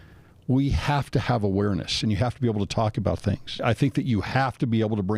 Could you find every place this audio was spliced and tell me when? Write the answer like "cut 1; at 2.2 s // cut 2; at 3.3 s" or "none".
cut 1; at 2.0 s // cut 2; at 3.6 s